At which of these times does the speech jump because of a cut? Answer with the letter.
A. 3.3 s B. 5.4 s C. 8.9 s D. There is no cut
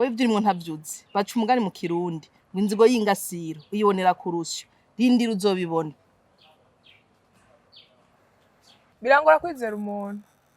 C